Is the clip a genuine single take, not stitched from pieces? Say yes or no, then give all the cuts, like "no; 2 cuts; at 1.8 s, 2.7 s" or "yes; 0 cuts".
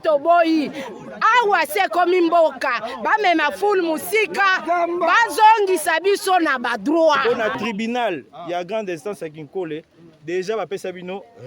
no; 1 cut; at 7.2 s